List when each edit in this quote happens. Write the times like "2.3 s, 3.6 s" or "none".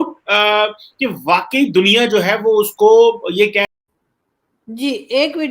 3.7 s